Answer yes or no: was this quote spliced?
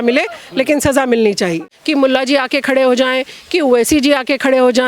yes